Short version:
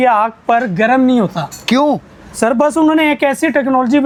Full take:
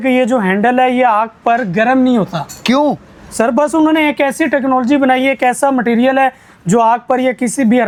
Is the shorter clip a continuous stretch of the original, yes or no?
yes